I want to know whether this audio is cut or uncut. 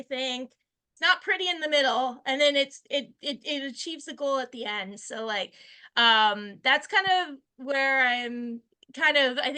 uncut